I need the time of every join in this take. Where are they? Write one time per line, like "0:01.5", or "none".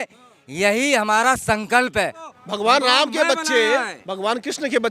0:02.3